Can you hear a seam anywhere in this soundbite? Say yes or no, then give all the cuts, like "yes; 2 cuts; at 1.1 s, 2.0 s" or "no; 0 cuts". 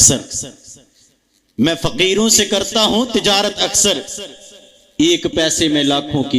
no; 0 cuts